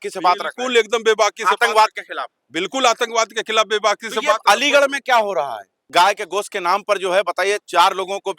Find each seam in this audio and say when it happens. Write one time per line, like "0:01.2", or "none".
0:05.8